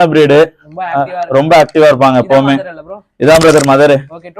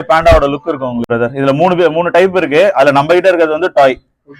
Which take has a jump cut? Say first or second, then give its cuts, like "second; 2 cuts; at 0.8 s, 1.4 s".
second; 1 cut; at 1.1 s